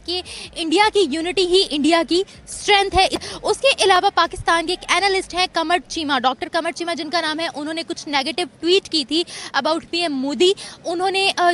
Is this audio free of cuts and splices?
yes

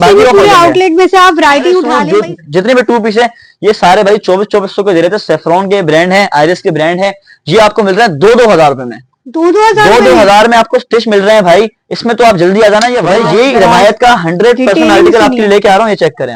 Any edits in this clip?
yes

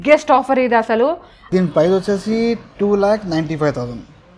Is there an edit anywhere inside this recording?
yes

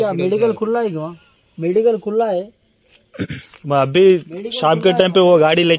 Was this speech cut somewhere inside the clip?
no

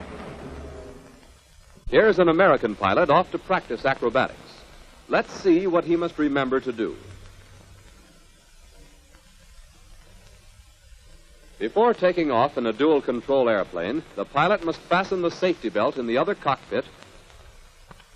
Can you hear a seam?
no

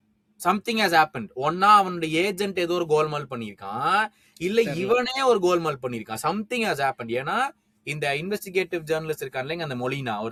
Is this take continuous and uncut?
yes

